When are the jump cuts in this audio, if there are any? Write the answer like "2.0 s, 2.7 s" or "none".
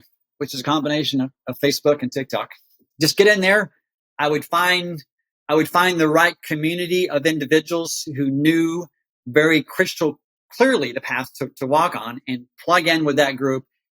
2.9 s